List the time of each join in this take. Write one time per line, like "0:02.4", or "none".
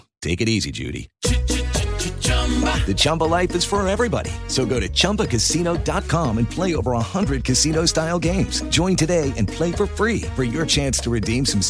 none